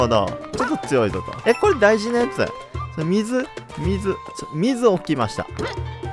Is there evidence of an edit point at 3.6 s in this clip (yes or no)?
no